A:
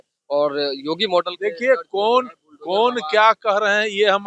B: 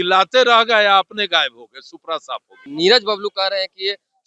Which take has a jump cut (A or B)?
B